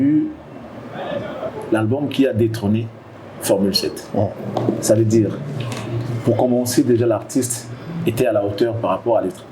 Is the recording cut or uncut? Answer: uncut